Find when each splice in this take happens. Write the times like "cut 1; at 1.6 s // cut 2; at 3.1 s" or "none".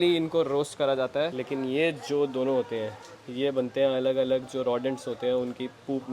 cut 1; at 1.3 s